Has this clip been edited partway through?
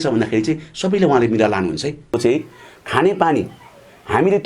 yes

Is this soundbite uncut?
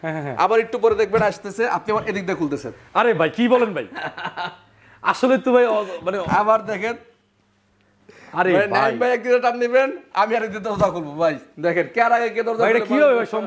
yes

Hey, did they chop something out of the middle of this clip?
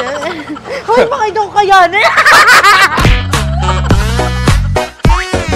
yes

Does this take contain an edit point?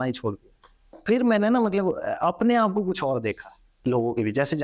yes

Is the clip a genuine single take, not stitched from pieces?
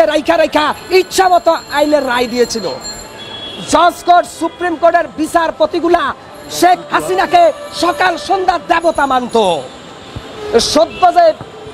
yes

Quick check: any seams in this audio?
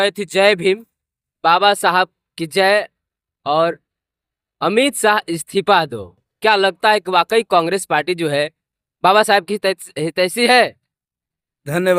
no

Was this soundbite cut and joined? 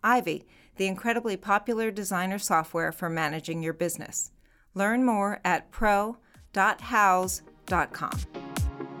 yes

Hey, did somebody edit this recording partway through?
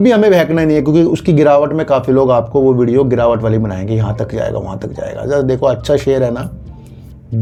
no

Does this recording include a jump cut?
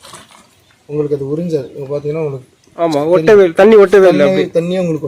no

